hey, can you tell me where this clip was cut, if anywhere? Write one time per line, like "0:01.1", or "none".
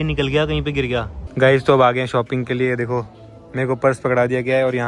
0:01.2

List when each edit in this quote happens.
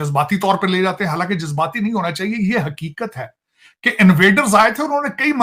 none

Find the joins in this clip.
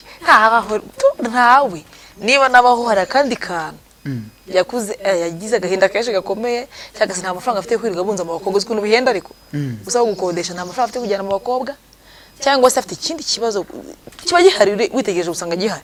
none

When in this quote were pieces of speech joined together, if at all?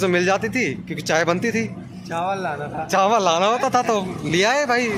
none

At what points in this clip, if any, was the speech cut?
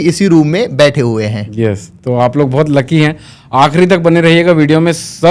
none

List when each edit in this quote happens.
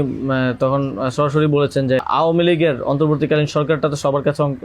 0:02.1

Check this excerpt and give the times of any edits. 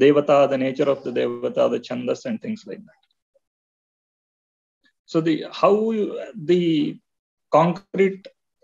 none

